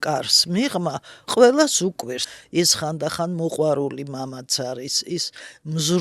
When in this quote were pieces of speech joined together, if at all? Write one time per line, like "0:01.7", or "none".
0:02.2